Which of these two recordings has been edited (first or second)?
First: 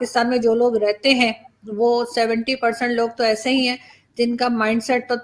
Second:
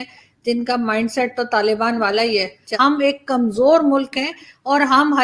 second